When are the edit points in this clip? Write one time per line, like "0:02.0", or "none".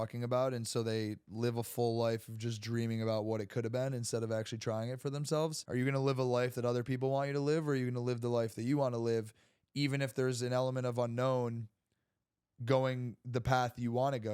0:05.6

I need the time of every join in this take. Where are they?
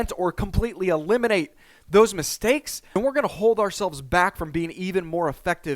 0:02.8

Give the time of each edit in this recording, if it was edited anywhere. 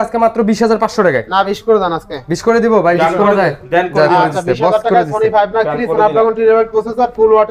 none

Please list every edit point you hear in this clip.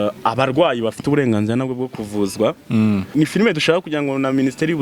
0:03.1

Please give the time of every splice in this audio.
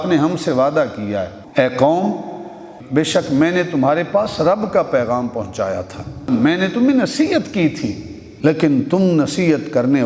0:01.4
0:02.7
0:06.3
0:08.2

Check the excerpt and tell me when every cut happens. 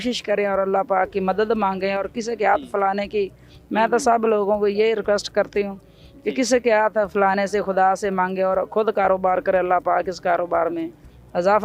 none

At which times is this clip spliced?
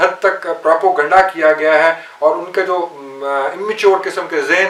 none

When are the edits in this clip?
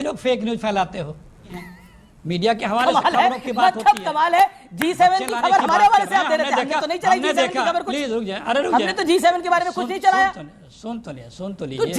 none

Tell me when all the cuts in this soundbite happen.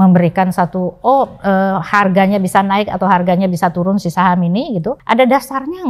0:05.0

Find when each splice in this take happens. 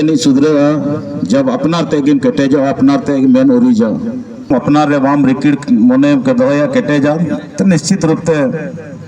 0:04.5

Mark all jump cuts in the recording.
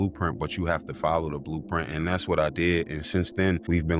none

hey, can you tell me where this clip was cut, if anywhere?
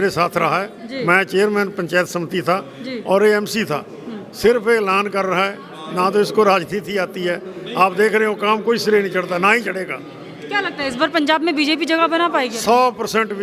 none

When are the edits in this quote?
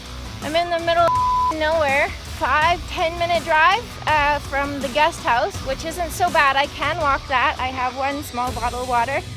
0:02.2

